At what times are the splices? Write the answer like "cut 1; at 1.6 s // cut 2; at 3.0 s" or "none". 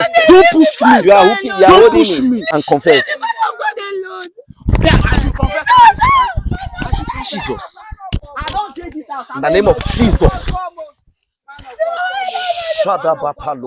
cut 1; at 2.4 s // cut 2; at 8.2 s